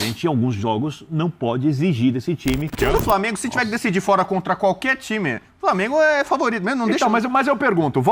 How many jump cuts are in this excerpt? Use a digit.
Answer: 1